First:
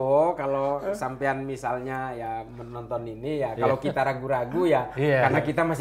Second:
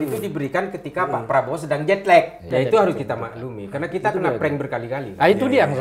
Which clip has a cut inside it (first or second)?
second